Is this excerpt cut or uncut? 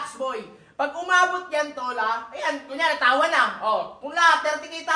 uncut